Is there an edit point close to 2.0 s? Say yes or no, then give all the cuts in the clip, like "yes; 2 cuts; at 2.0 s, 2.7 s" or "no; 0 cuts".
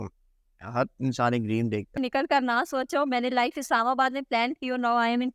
yes; 1 cut; at 2.0 s